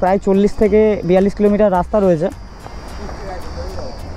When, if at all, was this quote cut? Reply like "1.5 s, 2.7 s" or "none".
none